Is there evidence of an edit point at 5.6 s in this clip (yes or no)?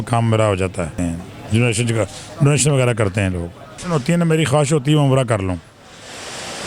no